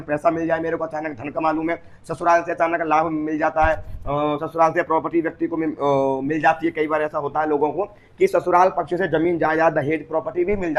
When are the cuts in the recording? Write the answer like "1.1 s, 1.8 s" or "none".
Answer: none